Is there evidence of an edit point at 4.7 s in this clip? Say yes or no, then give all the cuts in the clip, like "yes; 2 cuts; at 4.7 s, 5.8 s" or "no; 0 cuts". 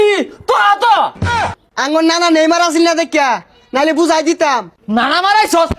yes; 2 cuts; at 1.3 s, 4.7 s